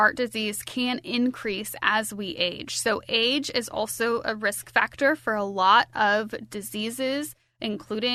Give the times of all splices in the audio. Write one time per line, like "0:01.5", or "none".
none